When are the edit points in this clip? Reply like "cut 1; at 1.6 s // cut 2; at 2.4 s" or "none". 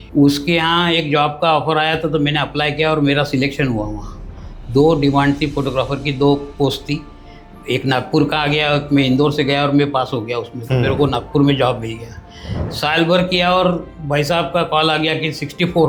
none